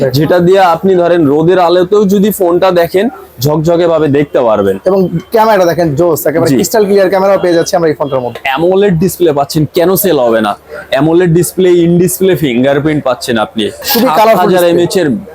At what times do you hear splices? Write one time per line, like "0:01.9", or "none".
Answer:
0:08.4
0:13.9